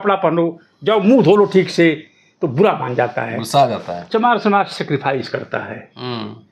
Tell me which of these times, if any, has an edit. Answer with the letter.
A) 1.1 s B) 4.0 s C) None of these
B